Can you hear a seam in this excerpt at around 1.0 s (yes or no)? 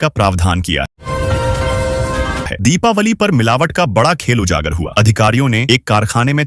no